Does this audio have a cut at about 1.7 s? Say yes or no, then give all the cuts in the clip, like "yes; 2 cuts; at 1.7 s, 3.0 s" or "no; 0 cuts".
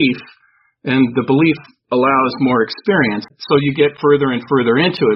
no; 1 cut; at 3.3 s